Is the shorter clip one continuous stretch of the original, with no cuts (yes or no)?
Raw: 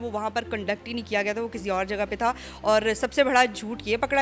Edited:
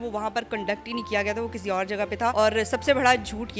no